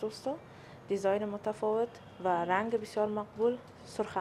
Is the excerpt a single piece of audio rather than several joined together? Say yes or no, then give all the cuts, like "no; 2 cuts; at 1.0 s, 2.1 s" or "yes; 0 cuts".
yes; 0 cuts